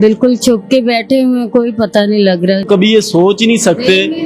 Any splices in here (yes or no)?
yes